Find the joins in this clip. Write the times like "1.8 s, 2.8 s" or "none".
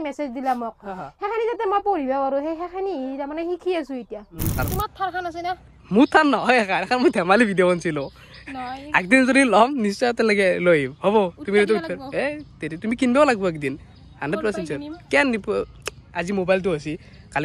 4.6 s